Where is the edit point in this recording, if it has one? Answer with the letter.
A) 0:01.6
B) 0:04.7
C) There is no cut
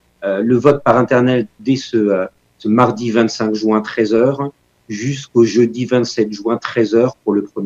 A